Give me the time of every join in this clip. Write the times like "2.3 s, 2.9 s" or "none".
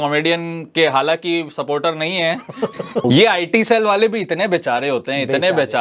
3.0 s